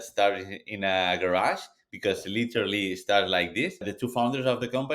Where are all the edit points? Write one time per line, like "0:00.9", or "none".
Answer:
0:04.0